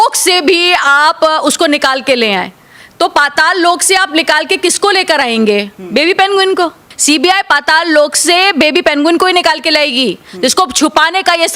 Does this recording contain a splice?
no; 0 cuts

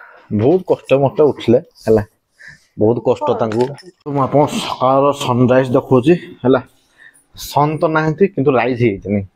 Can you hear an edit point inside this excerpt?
no; 0 cuts

